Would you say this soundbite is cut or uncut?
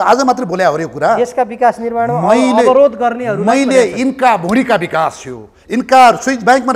uncut